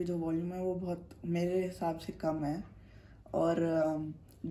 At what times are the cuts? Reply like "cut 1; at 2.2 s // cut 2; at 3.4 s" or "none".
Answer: none